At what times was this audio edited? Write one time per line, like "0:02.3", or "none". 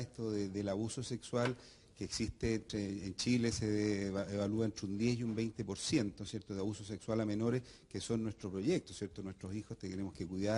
0:09.4